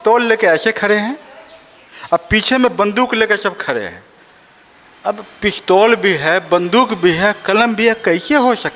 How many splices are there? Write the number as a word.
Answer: zero